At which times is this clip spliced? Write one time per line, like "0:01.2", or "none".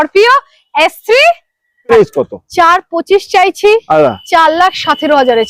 0:01.9

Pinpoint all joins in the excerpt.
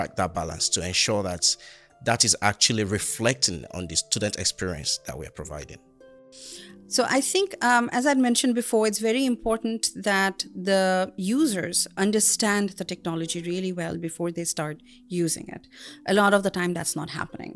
none

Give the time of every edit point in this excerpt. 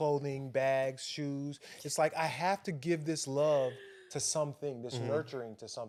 none

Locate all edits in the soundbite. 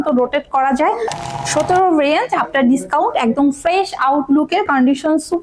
0:01.2

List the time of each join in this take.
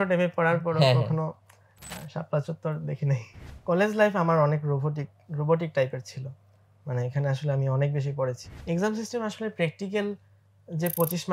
0:03.4
0:08.5

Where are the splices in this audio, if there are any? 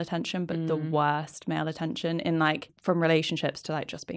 0:02.7

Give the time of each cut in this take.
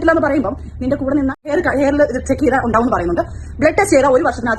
0:01.5

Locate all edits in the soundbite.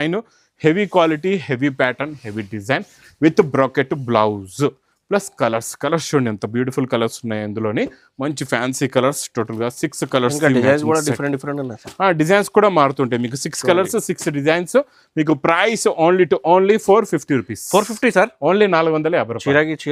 none

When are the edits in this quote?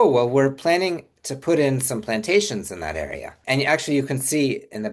0:03.4

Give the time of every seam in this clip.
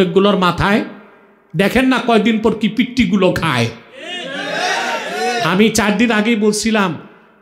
none

